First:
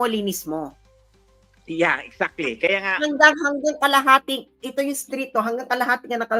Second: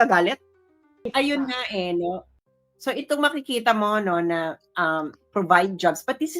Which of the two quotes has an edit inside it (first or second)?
second